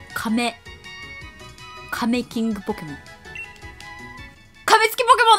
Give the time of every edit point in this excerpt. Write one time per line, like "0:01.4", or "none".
none